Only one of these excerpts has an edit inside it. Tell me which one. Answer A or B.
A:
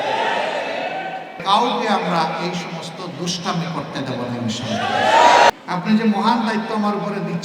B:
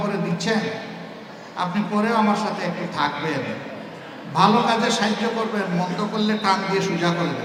A